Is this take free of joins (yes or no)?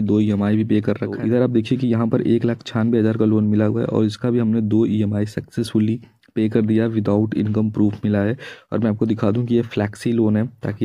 no